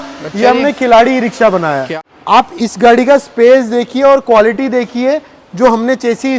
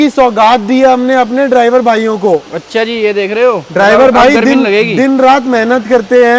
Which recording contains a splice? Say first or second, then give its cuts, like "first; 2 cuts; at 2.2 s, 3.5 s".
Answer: first; 1 cut; at 1.9 s